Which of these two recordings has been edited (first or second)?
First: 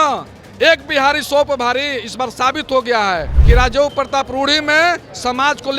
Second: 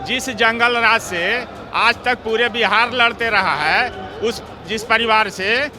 first